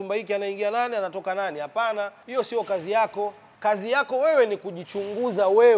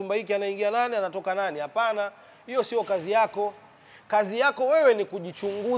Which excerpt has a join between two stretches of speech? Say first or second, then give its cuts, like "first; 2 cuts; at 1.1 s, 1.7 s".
first; 2 cuts; at 2.2 s, 3.4 s